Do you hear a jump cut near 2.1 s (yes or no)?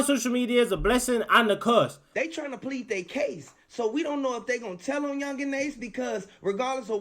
yes